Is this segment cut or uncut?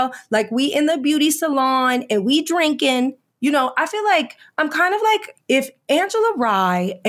cut